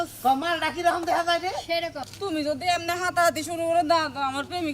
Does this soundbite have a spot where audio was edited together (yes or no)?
yes